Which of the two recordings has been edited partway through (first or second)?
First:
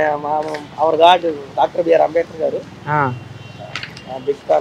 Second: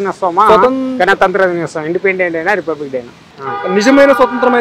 second